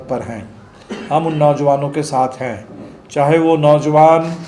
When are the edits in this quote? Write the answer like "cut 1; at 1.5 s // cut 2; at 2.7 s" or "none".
none

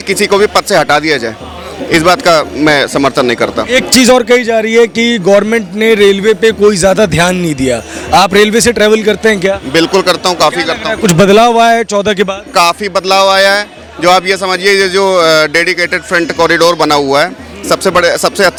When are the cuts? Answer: none

